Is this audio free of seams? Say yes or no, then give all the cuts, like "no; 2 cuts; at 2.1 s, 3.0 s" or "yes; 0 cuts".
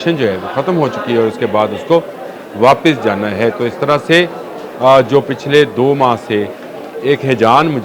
yes; 0 cuts